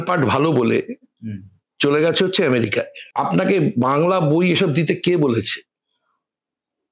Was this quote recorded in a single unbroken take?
no; 1 cut; at 3.0 s

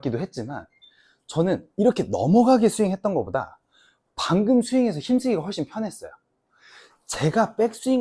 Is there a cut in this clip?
no; 0 cuts

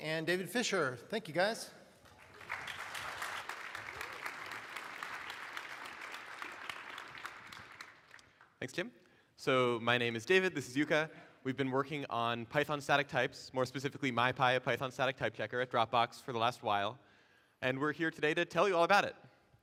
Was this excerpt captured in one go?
yes; 0 cuts

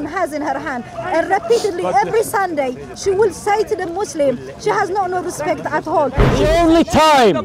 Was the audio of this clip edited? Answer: yes; 1 cut; at 6.3 s

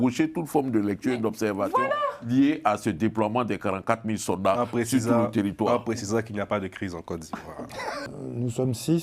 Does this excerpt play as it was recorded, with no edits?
no; 1 cut; at 8.0 s

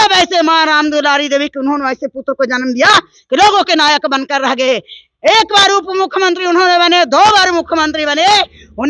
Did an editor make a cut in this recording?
no; 0 cuts

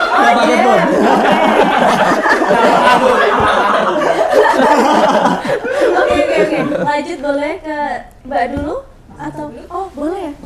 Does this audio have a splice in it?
no; 0 cuts

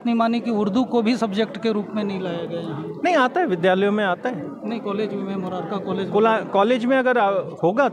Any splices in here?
no; 0 cuts

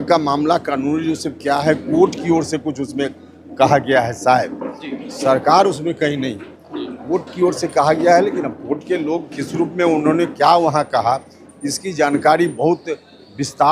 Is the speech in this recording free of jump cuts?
yes; 0 cuts

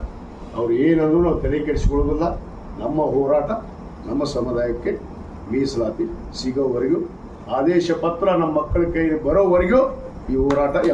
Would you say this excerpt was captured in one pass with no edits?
yes; 0 cuts

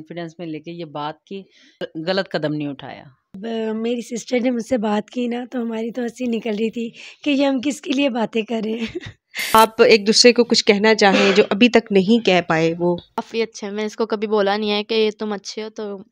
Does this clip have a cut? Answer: yes; 4 cuts; at 2.1 s, 3.3 s, 9.5 s, 13.3 s

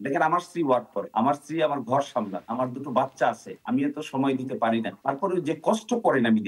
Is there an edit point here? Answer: yes; 4 cuts; at 1.0 s, 2.4 s, 3.5 s, 4.9 s

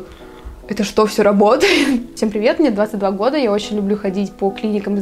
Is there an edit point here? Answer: yes; 1 cut; at 2.1 s

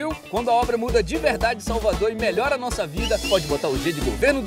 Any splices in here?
no; 0 cuts

